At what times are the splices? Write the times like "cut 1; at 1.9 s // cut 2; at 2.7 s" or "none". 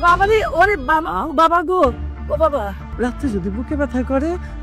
cut 1; at 2.9 s